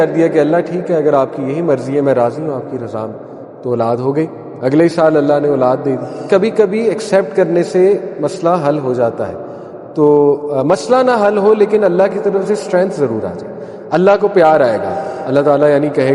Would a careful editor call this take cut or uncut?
cut